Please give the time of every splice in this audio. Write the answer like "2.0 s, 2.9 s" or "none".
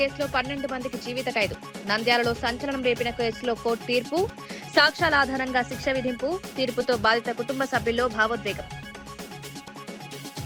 none